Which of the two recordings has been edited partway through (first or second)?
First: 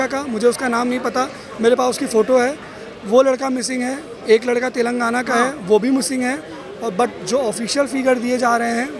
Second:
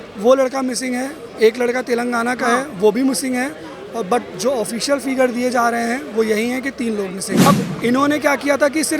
second